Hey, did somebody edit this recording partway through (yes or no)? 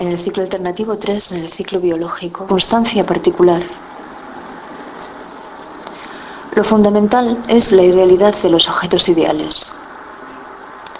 no